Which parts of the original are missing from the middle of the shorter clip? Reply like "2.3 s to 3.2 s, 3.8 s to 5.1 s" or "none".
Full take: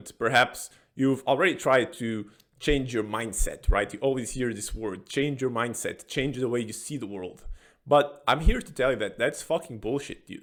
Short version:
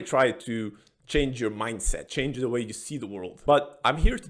3.6 s to 6.0 s, 7.3 s to 7.7 s